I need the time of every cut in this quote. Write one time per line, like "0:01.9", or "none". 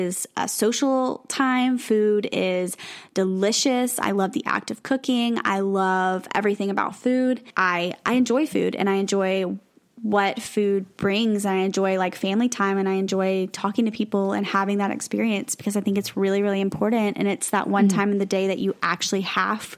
0:07.5